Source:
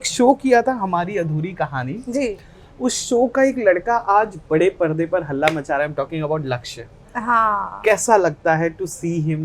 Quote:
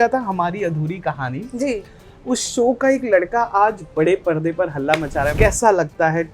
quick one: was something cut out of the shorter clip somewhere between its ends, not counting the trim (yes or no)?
yes